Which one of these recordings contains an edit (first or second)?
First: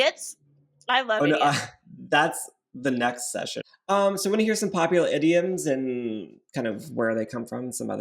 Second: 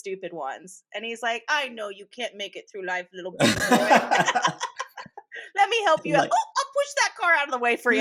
first